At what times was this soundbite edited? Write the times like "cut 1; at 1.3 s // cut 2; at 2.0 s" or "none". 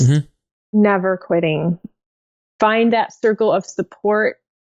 cut 1; at 1.9 s